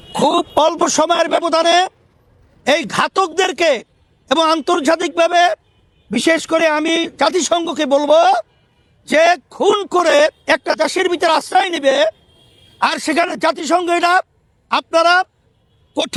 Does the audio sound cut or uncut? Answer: uncut